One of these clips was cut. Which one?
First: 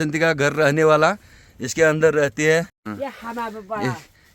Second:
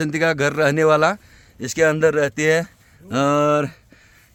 first; 1 cut; at 2.3 s

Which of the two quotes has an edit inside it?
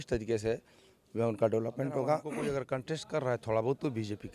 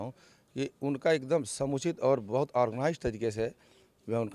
first; 1 cut; at 2.4 s

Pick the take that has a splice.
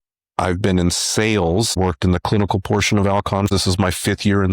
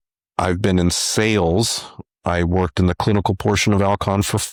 first; 2 cuts; at 1.7 s, 3.5 s

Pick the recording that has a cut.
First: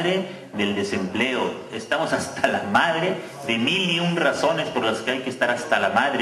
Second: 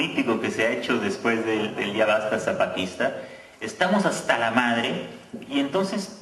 second; 1 cut; at 4.0 s

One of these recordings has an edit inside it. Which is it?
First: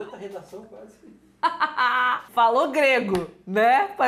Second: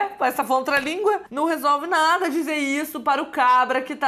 second; 1 cut; at 1.3 s

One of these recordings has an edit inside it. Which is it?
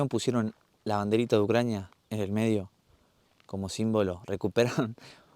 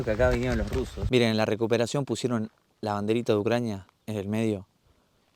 second; 1 cut; at 1.0 s

